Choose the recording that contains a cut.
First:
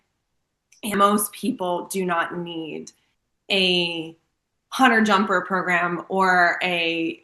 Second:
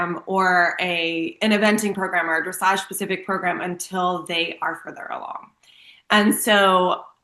first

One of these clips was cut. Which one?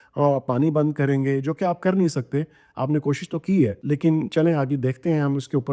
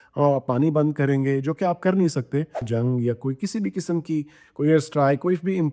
second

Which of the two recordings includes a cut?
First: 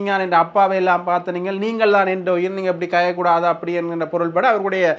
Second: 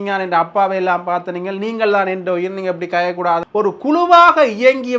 second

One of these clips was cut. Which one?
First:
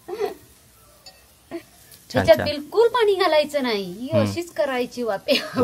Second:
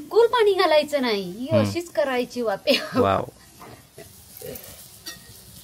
first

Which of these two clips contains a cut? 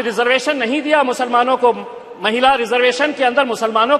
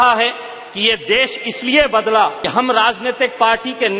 second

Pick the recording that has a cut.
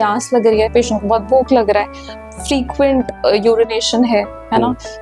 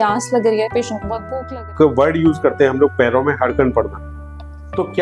second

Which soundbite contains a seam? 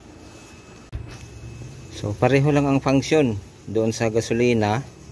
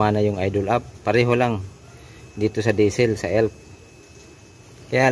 first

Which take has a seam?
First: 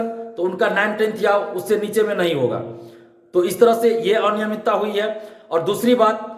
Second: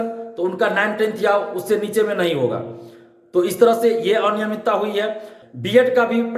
second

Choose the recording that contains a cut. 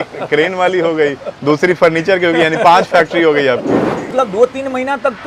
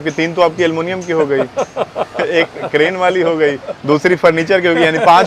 first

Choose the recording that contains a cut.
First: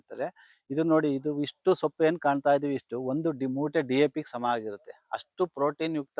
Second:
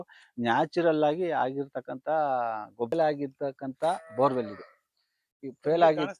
second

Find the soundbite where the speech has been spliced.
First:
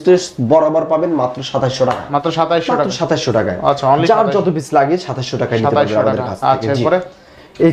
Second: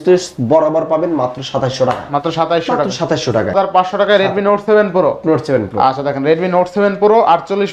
second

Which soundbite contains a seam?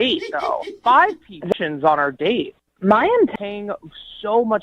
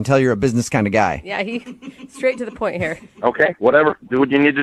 first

